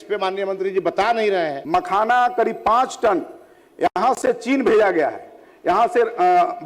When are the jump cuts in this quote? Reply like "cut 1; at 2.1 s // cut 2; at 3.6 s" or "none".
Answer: cut 1; at 1.6 s